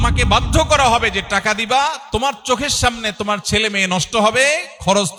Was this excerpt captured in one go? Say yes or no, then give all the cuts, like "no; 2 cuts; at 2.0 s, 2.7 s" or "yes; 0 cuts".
yes; 0 cuts